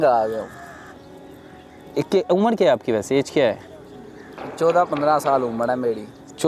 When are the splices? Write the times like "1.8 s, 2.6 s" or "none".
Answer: none

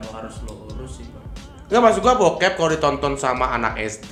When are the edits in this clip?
none

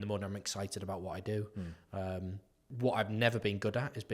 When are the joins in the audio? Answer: 2.6 s

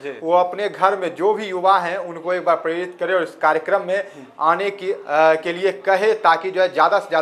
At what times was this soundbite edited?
none

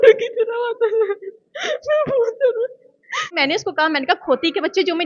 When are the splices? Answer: 3.4 s

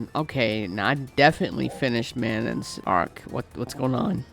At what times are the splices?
2.7 s

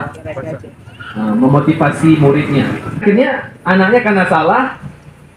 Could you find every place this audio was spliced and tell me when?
3.0 s

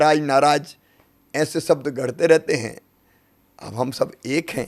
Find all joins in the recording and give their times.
none

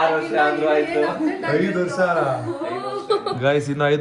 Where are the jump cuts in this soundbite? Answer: none

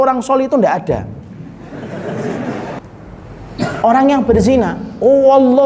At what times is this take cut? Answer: 2.8 s

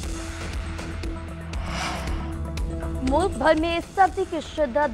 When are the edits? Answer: 1.7 s

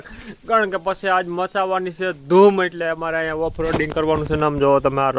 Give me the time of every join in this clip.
none

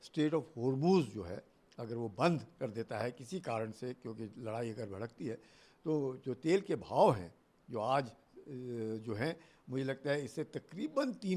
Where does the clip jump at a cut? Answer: none

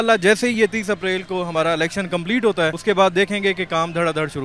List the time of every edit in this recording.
2.8 s

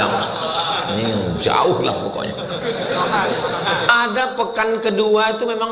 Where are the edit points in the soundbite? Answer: 3.9 s

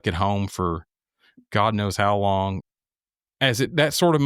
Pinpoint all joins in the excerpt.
2.6 s

